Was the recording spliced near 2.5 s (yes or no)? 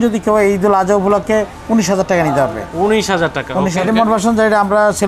no